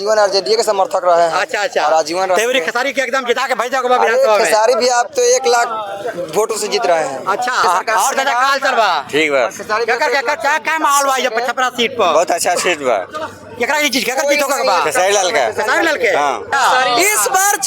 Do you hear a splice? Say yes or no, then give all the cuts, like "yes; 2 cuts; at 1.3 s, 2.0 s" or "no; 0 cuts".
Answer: yes; 2 cuts; at 7.6 s, 16.5 s